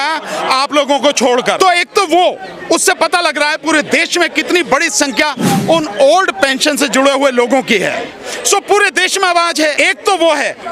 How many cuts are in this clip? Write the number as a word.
two